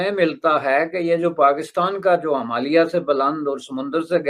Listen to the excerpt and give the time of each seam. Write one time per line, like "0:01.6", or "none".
none